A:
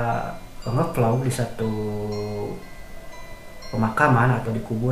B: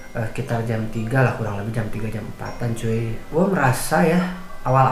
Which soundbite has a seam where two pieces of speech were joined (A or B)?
B